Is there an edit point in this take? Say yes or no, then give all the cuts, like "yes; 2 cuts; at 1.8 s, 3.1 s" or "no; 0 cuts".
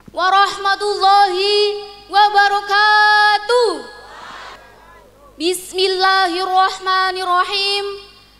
yes; 1 cut; at 4.5 s